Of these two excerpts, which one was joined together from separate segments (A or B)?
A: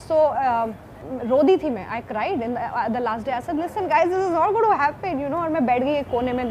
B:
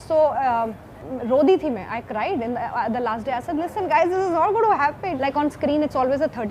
B